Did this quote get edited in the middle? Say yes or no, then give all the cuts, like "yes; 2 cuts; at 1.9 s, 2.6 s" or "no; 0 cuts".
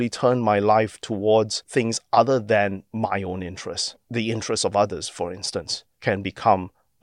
yes; 2 cuts; at 1.6 s, 3.9 s